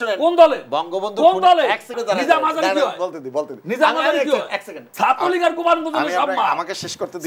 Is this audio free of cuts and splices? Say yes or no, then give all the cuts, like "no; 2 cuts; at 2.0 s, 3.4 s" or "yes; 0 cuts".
no; 2 cuts; at 2.0 s, 4.8 s